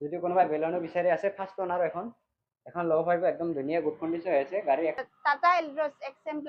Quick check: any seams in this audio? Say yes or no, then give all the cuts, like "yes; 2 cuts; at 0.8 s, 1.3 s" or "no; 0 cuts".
yes; 1 cut; at 5.1 s